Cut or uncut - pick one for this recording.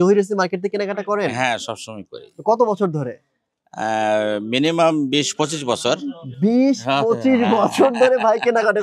uncut